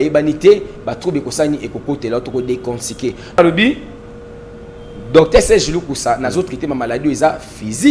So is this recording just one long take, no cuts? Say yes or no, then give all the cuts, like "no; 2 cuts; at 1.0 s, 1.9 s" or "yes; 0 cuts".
no; 1 cut; at 3.4 s